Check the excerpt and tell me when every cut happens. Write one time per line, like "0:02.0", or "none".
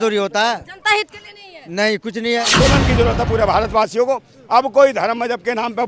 0:02.5